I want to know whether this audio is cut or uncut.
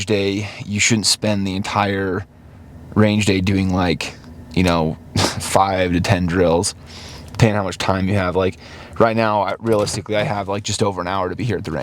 uncut